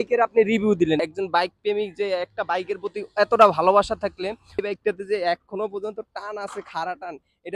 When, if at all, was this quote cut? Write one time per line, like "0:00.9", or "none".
0:01.0
0:04.6